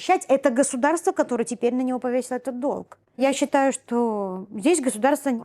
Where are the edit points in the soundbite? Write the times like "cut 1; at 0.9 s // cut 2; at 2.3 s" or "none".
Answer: none